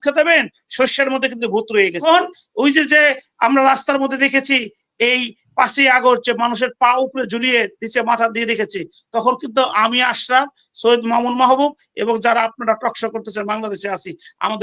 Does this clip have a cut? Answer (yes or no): yes